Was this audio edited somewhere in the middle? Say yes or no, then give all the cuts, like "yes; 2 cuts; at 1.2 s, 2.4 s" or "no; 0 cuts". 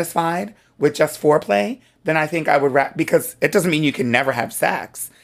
no; 0 cuts